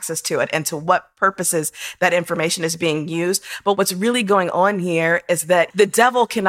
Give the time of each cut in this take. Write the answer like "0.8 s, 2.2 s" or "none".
3.8 s, 5.7 s